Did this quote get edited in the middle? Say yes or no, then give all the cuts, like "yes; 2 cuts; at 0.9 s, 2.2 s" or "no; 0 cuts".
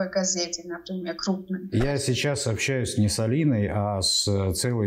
yes; 1 cut; at 1.7 s